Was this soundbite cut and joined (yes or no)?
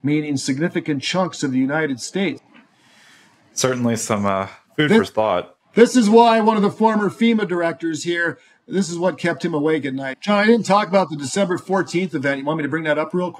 yes